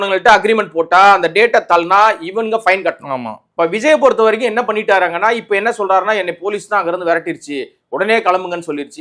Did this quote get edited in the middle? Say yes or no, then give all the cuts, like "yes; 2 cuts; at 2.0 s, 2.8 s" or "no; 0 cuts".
yes; 1 cut; at 3.4 s